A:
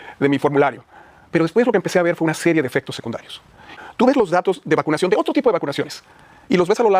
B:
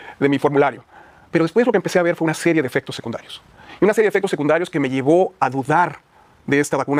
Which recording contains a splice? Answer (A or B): A